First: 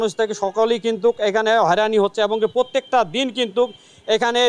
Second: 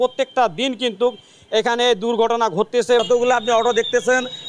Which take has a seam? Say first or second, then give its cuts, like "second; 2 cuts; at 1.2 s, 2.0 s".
second; 1 cut; at 3.0 s